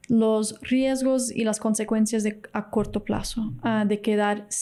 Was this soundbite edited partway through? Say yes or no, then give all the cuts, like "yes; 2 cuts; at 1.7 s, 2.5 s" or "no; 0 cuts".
no; 0 cuts